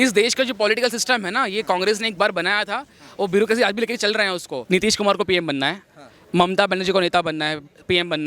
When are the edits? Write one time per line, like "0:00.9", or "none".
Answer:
0:04.5